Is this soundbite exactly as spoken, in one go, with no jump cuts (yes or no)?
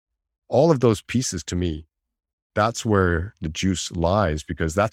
yes